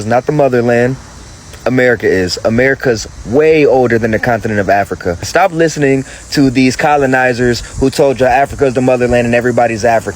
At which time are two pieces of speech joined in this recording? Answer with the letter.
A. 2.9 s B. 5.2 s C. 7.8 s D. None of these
B